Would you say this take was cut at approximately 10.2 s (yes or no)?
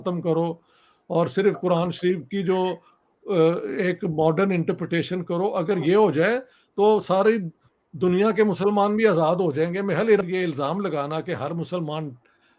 yes